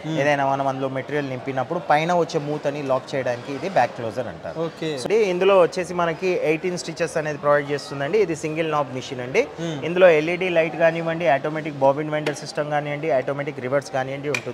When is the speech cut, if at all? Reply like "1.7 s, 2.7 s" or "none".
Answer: 5.0 s